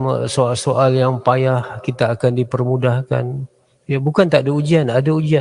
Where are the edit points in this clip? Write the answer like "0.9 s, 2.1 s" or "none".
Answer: none